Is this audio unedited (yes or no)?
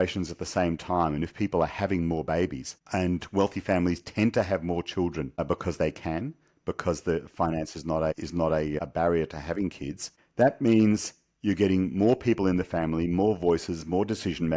yes